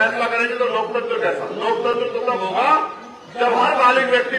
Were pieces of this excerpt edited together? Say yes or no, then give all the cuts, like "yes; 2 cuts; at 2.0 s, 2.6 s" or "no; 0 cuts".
no; 0 cuts